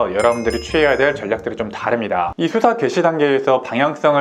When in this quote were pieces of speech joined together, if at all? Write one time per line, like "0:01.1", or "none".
0:02.3